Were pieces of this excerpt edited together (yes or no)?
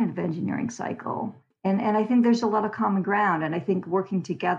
no